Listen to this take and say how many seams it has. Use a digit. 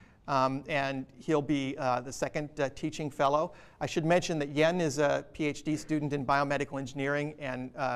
1